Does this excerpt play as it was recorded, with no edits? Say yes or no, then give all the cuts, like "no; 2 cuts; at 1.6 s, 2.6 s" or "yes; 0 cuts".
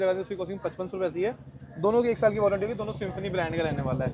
yes; 0 cuts